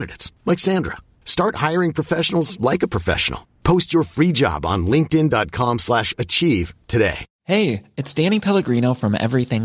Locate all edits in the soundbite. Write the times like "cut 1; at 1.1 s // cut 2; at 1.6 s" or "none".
cut 1; at 7.3 s